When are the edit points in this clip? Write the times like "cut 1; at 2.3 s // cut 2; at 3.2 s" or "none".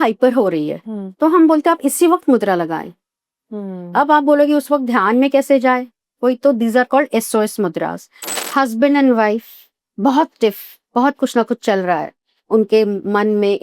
cut 1; at 8.1 s